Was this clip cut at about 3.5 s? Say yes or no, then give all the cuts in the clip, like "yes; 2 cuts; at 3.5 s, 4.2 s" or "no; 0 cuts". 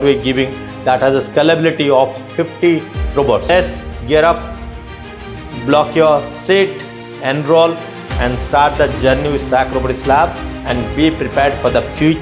yes; 1 cut; at 3.5 s